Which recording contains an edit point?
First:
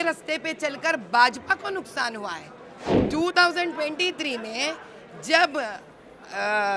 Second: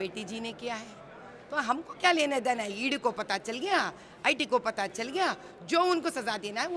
first; 1 cut; at 2.9 s

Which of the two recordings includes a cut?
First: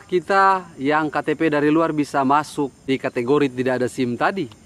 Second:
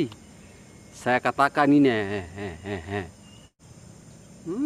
first; 1 cut; at 2.8 s

